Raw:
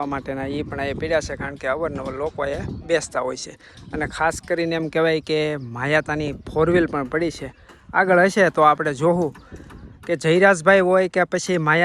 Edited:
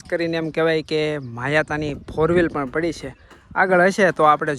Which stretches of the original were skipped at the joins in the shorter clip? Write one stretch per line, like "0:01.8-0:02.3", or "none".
none